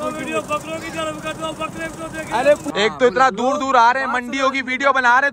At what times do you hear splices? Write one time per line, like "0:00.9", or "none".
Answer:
0:02.7